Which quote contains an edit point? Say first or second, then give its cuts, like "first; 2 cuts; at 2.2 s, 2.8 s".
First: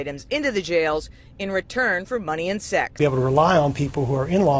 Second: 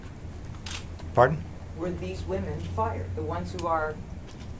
first; 1 cut; at 3.0 s